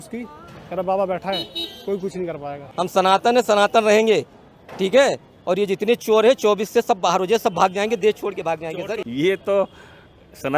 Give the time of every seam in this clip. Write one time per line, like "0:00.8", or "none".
0:02.6
0:09.1